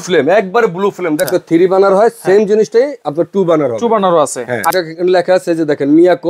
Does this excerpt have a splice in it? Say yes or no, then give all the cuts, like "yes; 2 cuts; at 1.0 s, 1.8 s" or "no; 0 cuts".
yes; 2 cuts; at 1.4 s, 4.7 s